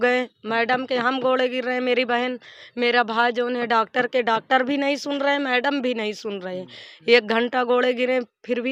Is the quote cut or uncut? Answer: uncut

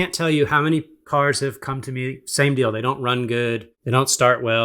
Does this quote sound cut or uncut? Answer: cut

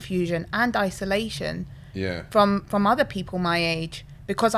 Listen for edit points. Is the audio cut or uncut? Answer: uncut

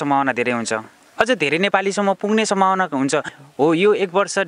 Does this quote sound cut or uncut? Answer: cut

